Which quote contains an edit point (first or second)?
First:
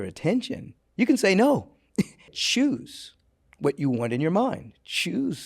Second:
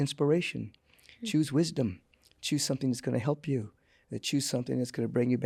first